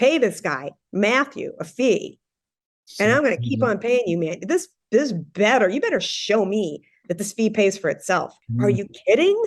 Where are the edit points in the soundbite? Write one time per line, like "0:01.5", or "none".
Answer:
0:08.4